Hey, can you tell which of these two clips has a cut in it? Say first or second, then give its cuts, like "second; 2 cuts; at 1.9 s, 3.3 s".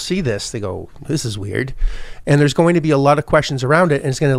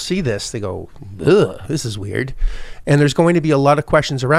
first; 1 cut; at 1.0 s